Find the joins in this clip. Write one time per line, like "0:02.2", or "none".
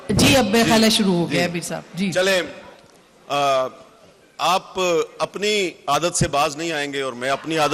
none